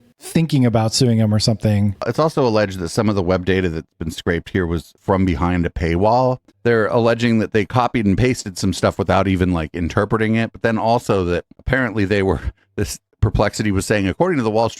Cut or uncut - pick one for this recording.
cut